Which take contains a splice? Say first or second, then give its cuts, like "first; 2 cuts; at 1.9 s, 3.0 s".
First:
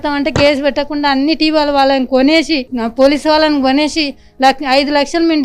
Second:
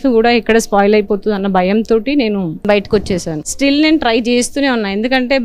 second; 2 cuts; at 2.6 s, 3.4 s